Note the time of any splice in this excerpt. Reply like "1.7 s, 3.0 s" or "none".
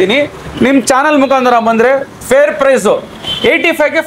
none